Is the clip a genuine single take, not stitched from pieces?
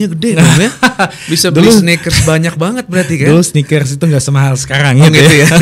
yes; 0 cuts

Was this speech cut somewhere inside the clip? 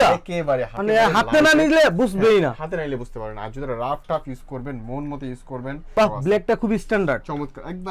yes; 1 cut; at 5.9 s

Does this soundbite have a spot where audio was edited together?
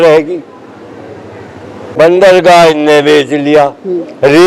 yes; 1 cut; at 1.8 s

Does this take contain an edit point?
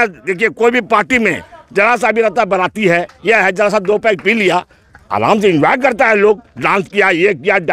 no; 0 cuts

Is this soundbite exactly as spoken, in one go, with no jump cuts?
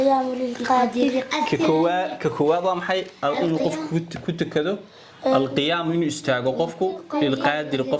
yes; 0 cuts

